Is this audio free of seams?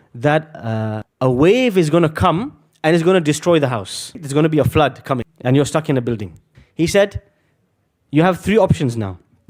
no; 1 cut; at 5.3 s

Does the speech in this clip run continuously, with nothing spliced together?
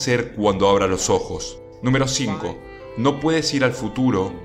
no; 1 cut; at 1.7 s

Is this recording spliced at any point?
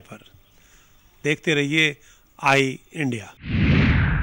yes; 1 cut; at 3.3 s

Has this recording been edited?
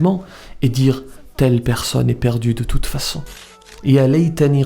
yes; 1 cut; at 3.4 s

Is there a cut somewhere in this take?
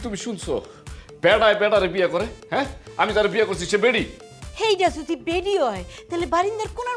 no; 0 cuts

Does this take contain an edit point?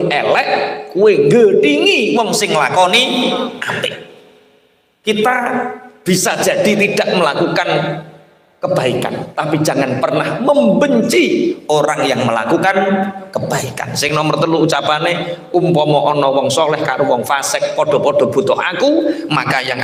no; 0 cuts

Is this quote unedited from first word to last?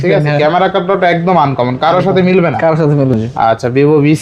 no; 1 cut; at 3.2 s

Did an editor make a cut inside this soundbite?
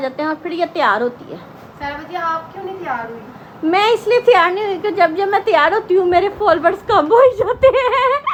no; 0 cuts

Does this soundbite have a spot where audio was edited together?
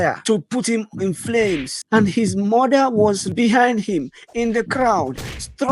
yes; 2 cuts; at 1.7 s, 3.3 s

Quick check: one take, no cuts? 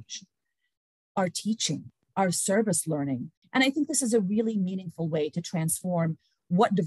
no; 1 cut; at 3.3 s

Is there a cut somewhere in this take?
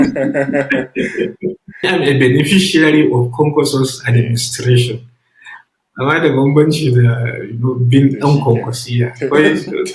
yes; 1 cut; at 1.8 s

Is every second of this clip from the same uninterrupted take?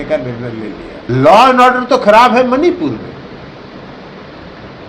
no; 1 cut; at 1.0 s

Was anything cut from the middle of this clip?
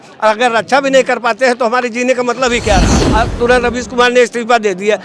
yes; 1 cut; at 3.0 s

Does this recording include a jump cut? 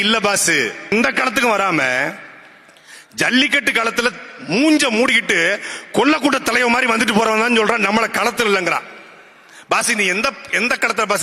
yes; 1 cut; at 0.9 s

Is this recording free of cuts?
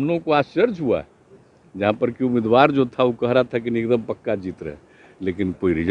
yes; 0 cuts

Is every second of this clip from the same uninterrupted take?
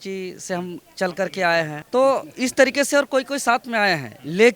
no; 1 cut; at 1.8 s

